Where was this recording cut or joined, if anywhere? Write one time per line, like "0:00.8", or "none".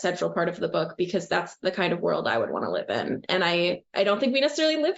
none